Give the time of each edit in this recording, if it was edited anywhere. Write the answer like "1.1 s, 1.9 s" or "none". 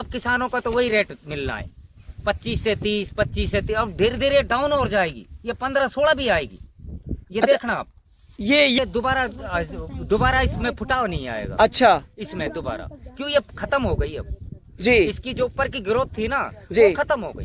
8.8 s